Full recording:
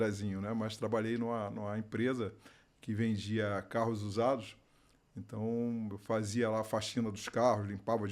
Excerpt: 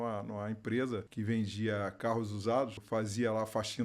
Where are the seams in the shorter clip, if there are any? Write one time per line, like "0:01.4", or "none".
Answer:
0:01.1
0:02.8